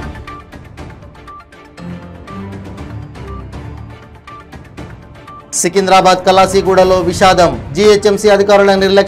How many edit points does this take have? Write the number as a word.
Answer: one